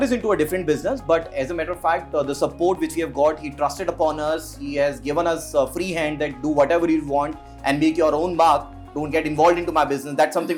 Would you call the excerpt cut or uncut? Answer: uncut